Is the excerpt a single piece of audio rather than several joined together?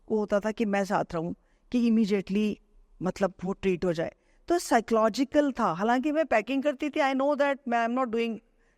yes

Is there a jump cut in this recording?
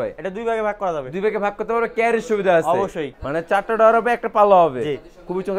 yes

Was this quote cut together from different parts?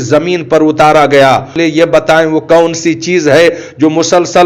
yes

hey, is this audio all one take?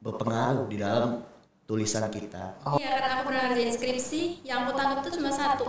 no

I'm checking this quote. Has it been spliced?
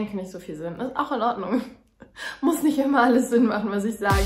no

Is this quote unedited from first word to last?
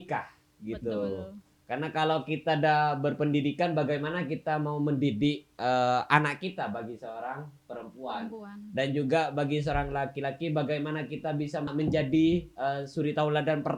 yes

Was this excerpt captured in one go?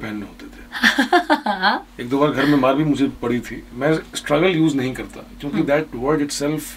no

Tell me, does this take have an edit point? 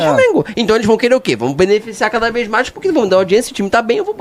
no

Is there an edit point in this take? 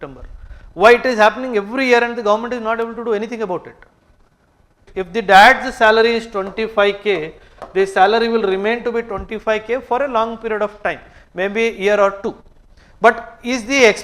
yes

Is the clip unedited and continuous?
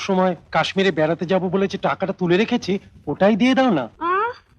yes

